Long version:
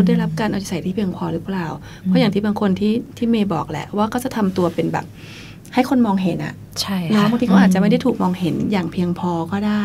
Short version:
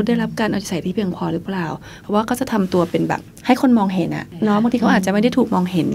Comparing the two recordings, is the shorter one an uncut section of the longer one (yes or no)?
no